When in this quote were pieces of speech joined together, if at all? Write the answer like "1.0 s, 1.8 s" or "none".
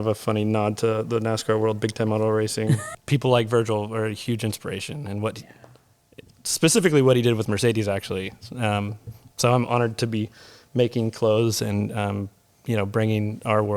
2.8 s

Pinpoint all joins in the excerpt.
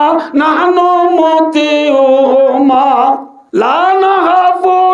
3.4 s

